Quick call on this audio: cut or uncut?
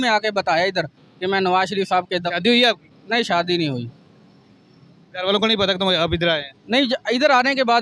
uncut